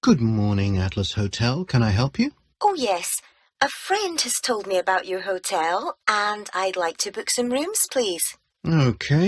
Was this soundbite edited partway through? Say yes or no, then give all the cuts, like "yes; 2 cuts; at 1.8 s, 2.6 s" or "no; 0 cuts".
yes; 1 cut; at 2.4 s